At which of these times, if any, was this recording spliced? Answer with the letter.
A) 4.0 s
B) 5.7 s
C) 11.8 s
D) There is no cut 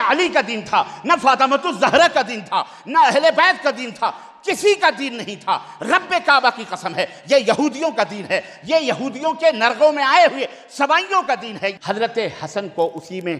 C